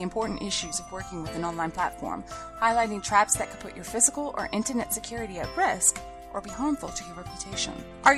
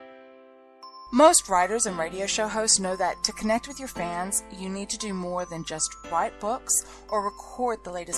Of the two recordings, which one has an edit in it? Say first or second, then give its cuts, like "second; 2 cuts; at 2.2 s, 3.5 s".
second; 1 cut; at 1.1 s